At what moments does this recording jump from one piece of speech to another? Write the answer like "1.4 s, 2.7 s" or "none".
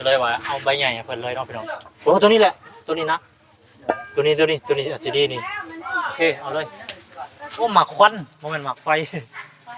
1.6 s, 7.6 s